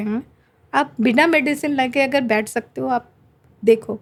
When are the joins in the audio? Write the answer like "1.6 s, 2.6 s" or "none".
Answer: none